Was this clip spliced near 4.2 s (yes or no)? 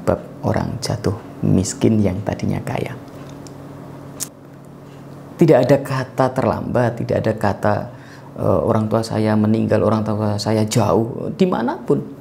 yes